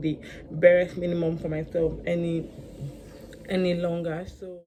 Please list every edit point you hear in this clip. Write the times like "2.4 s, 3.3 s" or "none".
none